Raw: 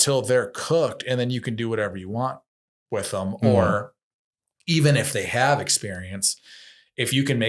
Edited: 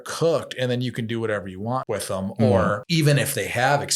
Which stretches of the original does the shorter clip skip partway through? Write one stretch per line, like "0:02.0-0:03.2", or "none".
0:02.3-0:02.9
0:03.9-0:04.6